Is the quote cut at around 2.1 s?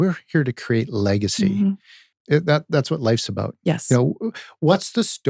yes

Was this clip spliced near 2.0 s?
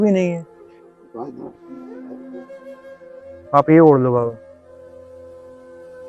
yes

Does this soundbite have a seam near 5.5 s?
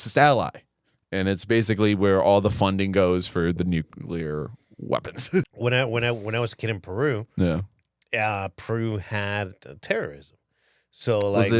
yes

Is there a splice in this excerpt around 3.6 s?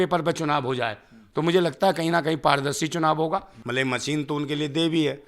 yes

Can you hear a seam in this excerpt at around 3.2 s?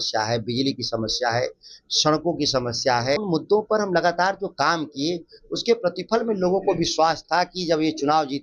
yes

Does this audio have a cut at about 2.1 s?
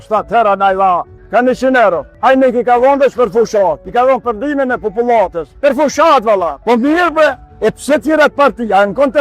yes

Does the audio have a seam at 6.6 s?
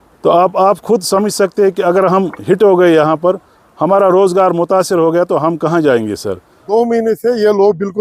yes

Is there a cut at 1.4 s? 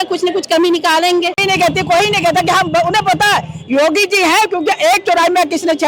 yes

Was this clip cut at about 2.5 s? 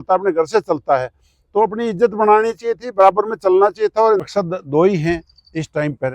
no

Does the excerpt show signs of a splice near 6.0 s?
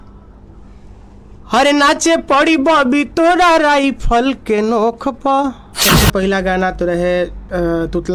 yes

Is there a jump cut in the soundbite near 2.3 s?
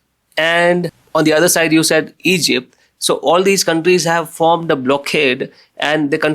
no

